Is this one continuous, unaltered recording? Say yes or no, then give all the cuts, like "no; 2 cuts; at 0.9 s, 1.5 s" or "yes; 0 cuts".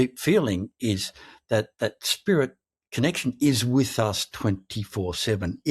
yes; 0 cuts